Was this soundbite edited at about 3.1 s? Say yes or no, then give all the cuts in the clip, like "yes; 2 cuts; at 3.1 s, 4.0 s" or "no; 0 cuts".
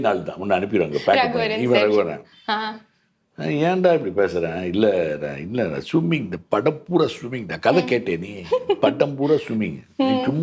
no; 0 cuts